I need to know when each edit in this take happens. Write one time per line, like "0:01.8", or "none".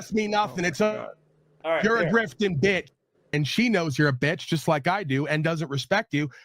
0:03.3